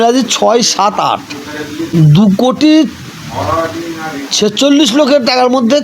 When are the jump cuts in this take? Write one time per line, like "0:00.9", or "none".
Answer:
0:01.9